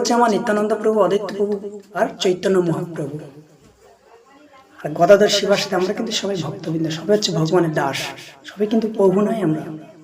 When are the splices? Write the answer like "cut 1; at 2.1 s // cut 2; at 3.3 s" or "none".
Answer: cut 1; at 1.8 s